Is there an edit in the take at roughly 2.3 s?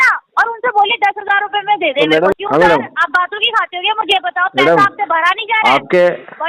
yes; 1 cut; at 2.3 s

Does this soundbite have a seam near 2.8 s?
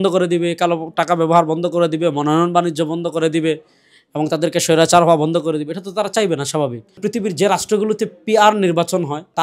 no; 1 cut; at 7.0 s

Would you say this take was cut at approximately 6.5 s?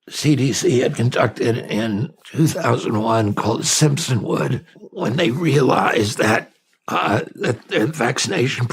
no; 2 cuts; at 2.2 s, 4.7 s

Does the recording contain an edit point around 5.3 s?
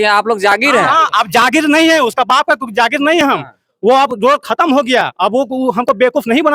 no; 0 cuts

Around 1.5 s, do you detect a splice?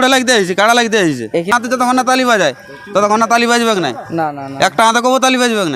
yes; 1 cut; at 1.5 s

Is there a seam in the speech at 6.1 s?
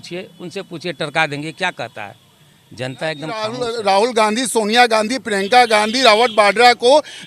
no; 1 cut; at 3.5 s

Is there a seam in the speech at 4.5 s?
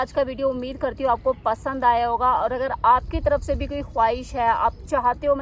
no; 0 cuts

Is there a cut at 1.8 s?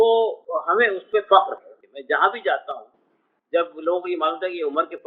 yes; 1 cut; at 1.8 s

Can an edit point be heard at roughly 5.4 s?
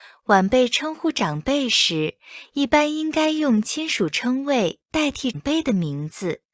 yes; 1 cut; at 5.4 s

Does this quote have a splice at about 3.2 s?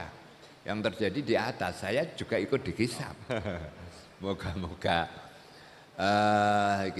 yes; 1 cut; at 3.2 s

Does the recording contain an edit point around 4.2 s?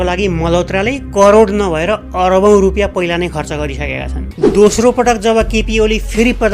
yes; 1 cut; at 4.2 s

